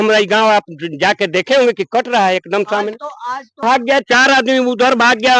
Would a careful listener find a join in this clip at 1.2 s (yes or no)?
no